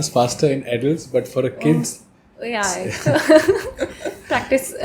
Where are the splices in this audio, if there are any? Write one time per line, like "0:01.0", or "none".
none